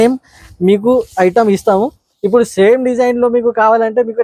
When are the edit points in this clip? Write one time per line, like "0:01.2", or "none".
none